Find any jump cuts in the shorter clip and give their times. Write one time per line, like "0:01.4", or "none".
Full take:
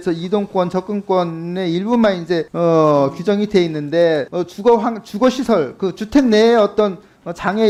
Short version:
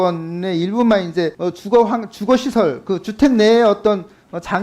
0:01.4